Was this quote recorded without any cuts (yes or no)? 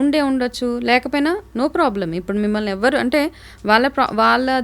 yes